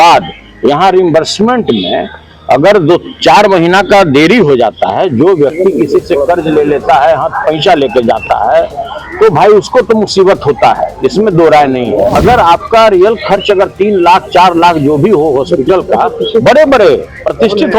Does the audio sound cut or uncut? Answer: cut